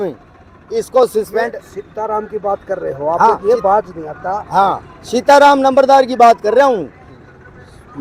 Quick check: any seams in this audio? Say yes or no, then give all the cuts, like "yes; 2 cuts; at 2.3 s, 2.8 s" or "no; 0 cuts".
no; 0 cuts